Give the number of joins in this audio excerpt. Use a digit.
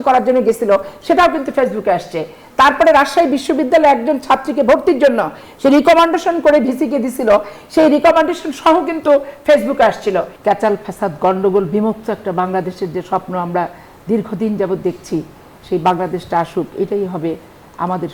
1